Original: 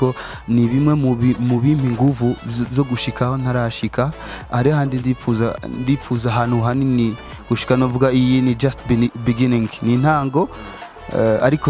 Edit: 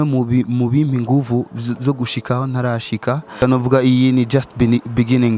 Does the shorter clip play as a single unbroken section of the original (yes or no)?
no